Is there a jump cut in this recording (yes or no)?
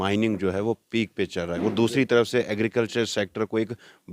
no